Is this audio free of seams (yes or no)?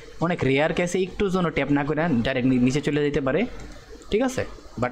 yes